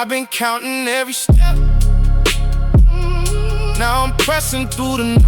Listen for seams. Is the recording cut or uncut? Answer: cut